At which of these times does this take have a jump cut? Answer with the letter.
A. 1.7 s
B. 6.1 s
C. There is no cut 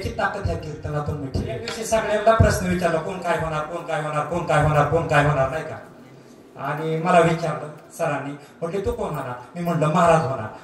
A